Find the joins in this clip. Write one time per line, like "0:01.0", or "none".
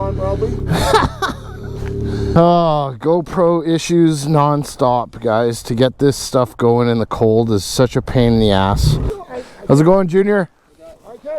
0:02.3
0:09.1